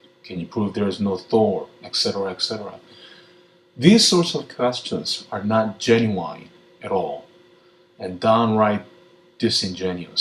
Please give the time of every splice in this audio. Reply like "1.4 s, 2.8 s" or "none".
8.5 s